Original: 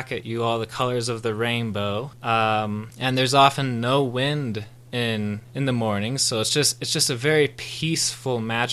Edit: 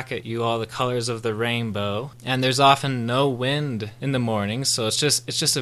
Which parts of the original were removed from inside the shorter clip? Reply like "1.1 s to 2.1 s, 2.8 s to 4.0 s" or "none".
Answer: 2.1 s to 2.9 s, 4.7 s to 5.5 s